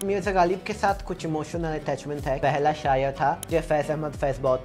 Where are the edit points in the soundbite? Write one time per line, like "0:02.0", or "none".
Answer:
0:02.4
0:03.4